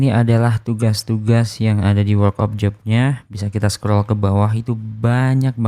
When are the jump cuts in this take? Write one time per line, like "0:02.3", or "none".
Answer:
none